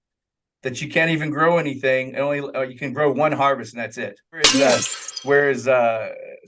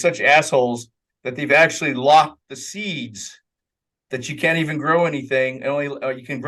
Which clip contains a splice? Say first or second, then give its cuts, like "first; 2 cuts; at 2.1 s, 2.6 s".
first; 1 cut; at 4.4 s